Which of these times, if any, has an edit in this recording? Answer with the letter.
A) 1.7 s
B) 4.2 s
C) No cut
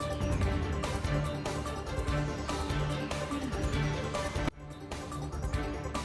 A